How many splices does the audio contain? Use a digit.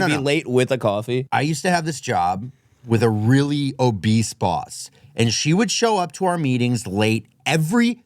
1